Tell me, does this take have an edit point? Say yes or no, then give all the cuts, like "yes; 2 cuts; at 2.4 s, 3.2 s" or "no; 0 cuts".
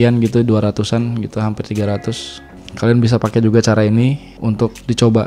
no; 0 cuts